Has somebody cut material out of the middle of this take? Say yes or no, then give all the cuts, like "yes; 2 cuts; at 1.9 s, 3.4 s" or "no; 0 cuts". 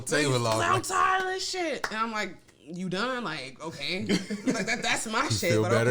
no; 0 cuts